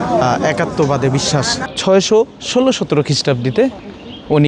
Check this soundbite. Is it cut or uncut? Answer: cut